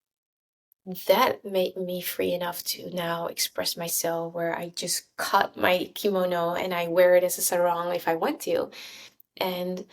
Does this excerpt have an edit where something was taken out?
no; 0 cuts

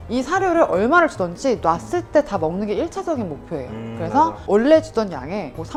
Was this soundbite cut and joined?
no; 0 cuts

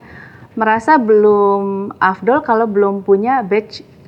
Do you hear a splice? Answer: no; 0 cuts

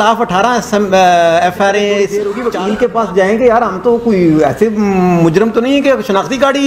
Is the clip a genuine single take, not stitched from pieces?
no; 1 cut; at 2.2 s

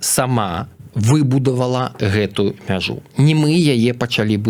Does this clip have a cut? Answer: no; 0 cuts

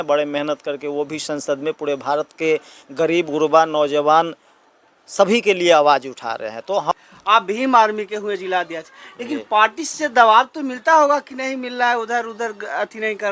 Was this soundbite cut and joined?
yes; 1 cut; at 7.0 s

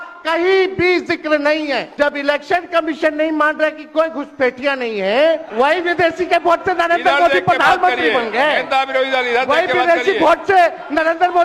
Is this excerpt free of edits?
no; 2 cuts; at 1.9 s, 5.5 s

